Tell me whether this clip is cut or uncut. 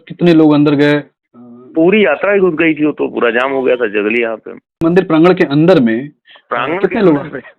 cut